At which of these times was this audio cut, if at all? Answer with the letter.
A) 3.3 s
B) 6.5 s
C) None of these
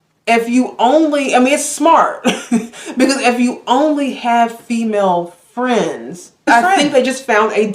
B